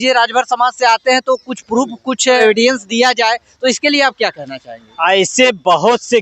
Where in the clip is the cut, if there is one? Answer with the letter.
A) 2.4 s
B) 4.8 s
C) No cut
A